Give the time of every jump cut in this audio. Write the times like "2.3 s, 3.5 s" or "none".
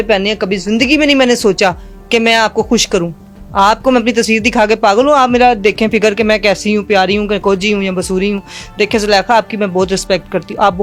none